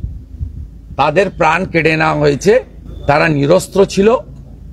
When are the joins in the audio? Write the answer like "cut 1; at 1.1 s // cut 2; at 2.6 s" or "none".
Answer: none